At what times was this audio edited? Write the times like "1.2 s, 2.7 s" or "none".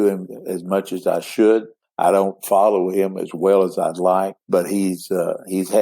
1.8 s, 4.4 s

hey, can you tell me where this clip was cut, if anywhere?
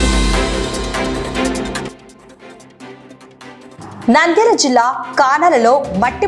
1.5 s, 3.7 s

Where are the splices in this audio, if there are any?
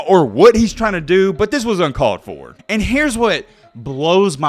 2.5 s

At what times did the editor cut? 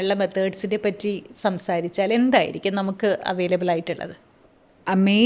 none

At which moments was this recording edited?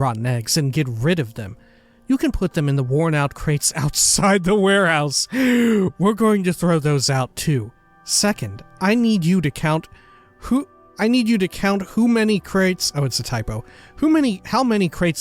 10.8 s

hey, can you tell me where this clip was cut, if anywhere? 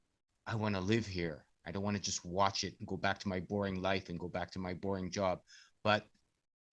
none

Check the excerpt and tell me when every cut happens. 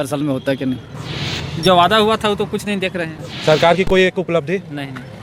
0.9 s, 3.2 s

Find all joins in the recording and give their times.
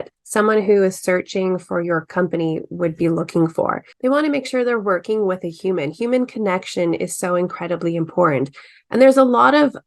3.8 s

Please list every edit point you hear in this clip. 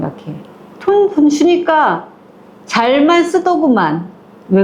none

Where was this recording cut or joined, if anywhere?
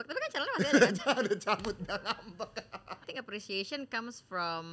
3.0 s

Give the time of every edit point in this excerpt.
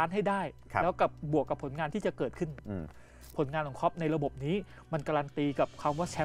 3.2 s

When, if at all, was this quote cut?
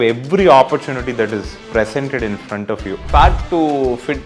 3.1 s

